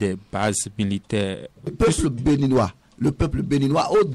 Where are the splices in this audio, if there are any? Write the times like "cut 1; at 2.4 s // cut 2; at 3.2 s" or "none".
cut 1; at 1.7 s